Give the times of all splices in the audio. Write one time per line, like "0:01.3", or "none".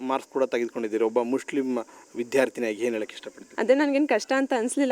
0:03.4